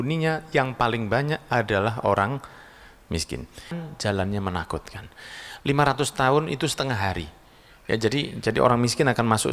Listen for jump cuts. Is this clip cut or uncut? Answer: cut